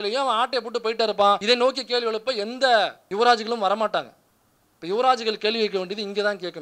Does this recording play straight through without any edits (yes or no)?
no